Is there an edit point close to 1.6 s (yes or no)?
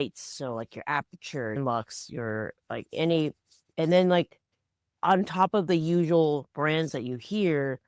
yes